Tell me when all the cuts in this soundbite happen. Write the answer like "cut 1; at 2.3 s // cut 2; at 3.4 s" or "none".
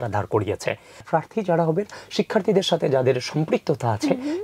cut 1; at 1.0 s

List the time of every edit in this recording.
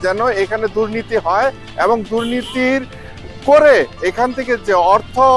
none

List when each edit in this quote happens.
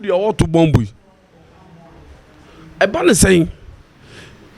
none

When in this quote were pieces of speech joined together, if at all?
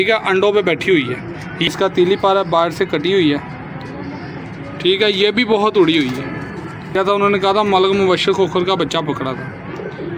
cut 1; at 1.7 s // cut 2; at 7.0 s

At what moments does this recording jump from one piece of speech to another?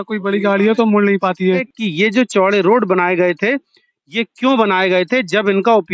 cut 1; at 1.8 s

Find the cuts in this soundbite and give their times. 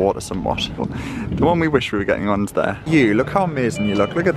cut 1; at 0.8 s // cut 2; at 2.8 s

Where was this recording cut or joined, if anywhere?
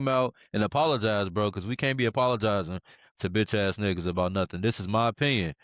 none

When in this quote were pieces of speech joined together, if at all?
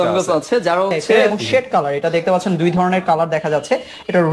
cut 1; at 1.2 s

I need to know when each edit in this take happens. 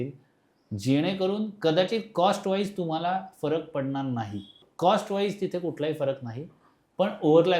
cut 1; at 4.6 s

